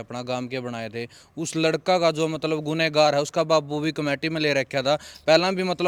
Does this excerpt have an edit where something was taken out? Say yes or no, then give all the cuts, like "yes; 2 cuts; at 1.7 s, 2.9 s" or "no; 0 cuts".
no; 0 cuts